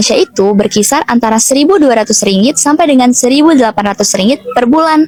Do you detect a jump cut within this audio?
no; 0 cuts

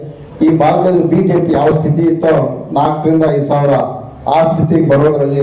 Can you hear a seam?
no; 0 cuts

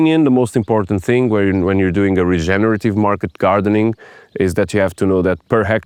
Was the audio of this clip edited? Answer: no; 0 cuts

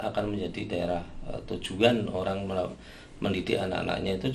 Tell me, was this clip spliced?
no; 0 cuts

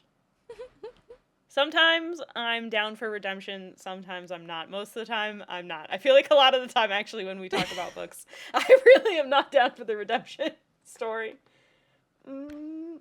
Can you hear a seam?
yes; 1 cut; at 1.3 s

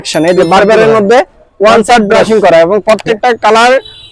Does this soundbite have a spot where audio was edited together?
no; 0 cuts

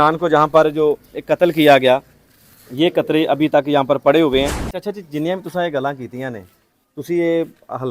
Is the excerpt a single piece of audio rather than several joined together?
no; 1 cut; at 4.7 s

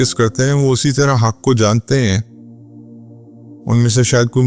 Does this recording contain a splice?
yes; 2 cuts; at 2.2 s, 3.6 s

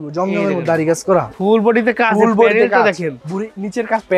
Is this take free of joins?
no; 1 cut; at 1.3 s

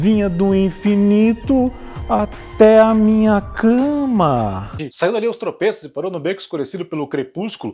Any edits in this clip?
yes; 1 cut; at 4.8 s

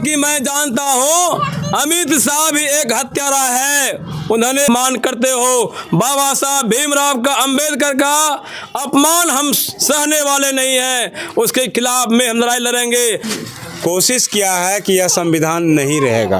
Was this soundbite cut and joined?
yes; 2 cuts; at 4.7 s, 13.3 s

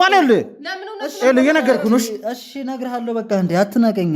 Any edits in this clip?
no; 0 cuts

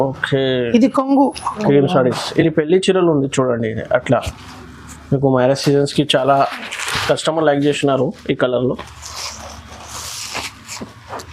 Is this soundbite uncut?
no; 1 cut; at 1.6 s

